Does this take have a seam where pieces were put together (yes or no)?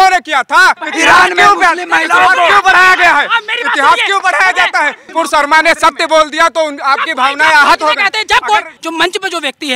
yes